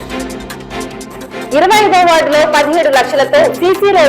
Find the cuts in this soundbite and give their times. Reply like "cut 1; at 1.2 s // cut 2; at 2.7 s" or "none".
cut 1; at 0.9 s